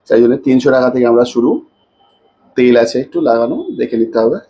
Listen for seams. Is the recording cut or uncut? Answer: uncut